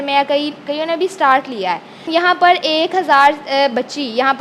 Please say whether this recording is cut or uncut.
cut